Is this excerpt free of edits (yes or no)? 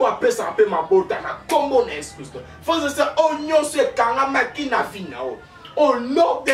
yes